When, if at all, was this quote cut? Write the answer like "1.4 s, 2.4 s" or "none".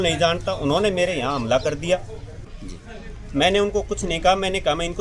2.5 s